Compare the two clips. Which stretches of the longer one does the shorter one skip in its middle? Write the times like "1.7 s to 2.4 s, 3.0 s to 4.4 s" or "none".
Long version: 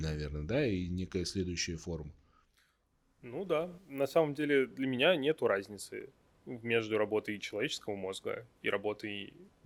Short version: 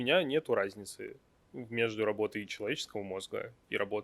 none